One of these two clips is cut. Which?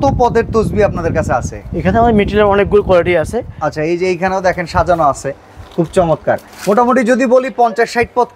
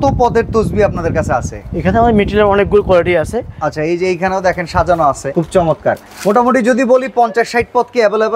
second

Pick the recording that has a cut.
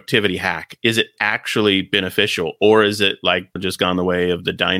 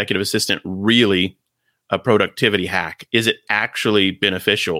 first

